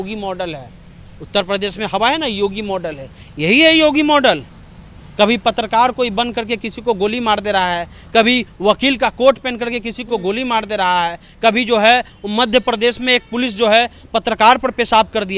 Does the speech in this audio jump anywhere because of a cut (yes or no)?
no